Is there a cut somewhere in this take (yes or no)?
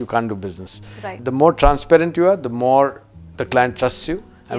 yes